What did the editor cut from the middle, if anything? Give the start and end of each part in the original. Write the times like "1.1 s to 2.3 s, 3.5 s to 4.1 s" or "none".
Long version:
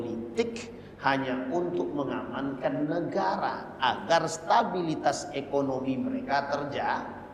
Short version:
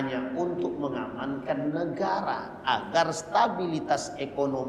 none